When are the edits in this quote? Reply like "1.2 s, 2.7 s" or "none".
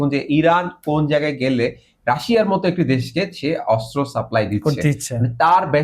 none